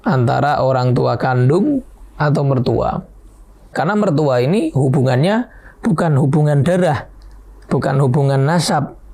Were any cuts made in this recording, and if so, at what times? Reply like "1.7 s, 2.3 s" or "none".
3.7 s